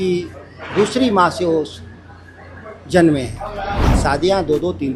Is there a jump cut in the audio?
yes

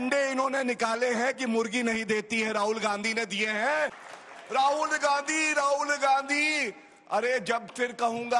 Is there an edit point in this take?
yes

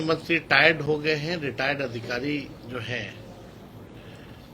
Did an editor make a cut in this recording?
no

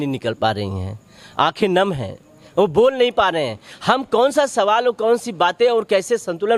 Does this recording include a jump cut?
no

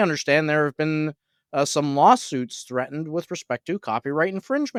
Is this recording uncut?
yes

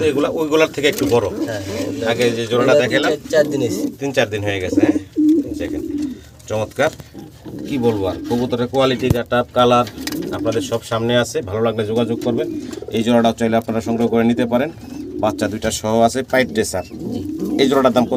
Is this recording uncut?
yes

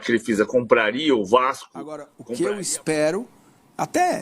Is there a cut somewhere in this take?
yes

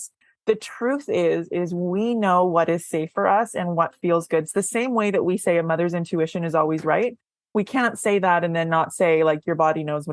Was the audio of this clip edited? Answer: no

